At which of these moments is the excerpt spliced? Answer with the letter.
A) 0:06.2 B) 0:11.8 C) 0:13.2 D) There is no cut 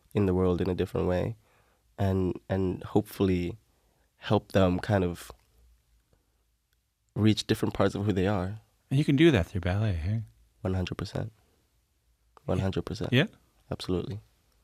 D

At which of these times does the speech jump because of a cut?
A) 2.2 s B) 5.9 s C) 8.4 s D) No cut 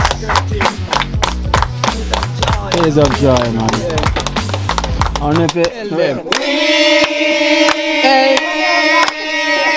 B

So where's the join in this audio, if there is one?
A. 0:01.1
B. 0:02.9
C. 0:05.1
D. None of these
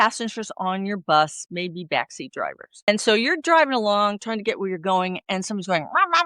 B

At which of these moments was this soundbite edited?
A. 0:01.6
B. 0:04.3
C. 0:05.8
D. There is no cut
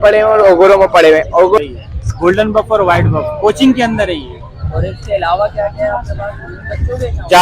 A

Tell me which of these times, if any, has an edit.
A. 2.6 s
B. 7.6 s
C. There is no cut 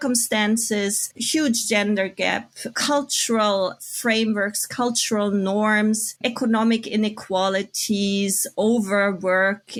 C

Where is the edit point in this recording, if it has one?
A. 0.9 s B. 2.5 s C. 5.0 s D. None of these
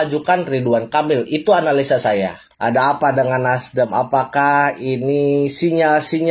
B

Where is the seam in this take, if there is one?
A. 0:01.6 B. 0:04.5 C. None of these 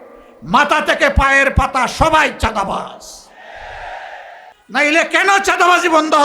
B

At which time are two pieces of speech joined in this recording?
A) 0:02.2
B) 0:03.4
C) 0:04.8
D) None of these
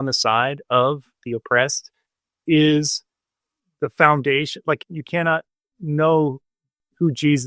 C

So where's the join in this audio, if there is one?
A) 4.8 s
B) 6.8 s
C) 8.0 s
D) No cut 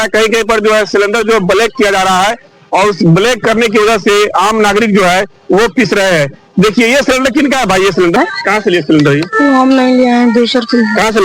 D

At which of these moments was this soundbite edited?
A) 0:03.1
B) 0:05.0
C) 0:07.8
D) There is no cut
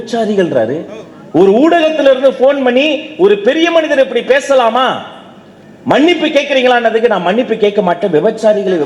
D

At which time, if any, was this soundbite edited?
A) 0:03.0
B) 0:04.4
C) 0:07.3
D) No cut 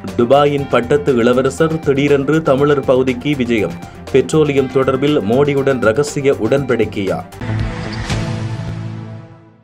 C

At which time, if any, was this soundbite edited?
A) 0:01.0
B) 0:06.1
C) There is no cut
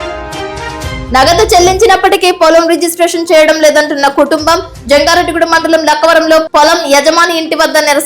A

